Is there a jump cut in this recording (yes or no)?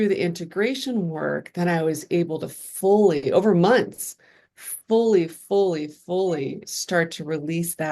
no